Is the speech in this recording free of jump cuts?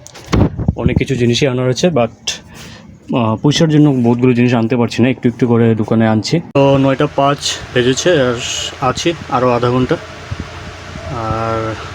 no; 1 cut; at 6.6 s

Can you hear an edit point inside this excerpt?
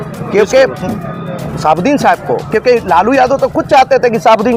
no; 0 cuts

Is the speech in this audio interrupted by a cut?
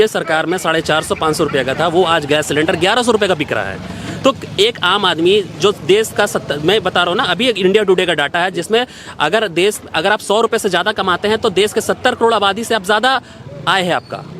no; 0 cuts

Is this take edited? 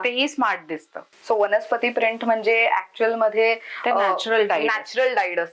yes; 1 cut; at 1.1 s

